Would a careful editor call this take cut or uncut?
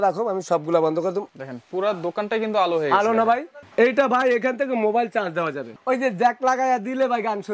cut